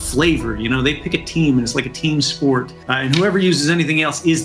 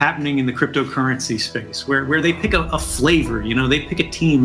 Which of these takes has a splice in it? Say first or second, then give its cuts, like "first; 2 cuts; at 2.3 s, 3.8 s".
first; 1 cut; at 2.8 s